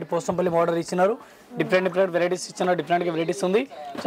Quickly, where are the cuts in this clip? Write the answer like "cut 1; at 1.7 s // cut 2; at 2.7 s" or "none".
none